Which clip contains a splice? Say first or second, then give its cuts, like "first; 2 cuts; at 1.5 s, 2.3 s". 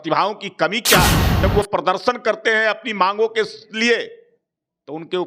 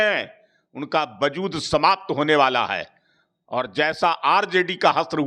first; 1 cut; at 1.4 s